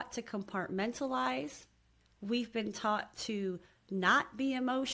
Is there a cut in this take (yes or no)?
yes